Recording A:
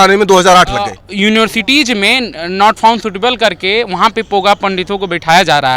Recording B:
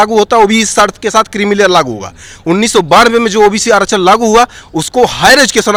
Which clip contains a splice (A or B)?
A